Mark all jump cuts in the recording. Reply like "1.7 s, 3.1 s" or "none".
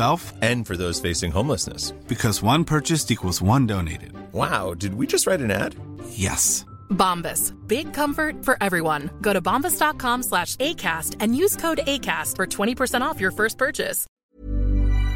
14.2 s